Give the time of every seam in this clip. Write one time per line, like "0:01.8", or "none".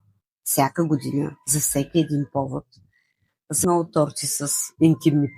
0:03.6